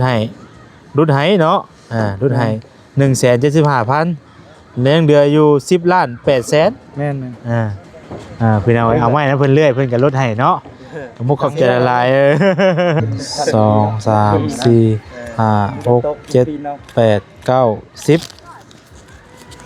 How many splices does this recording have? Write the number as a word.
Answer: one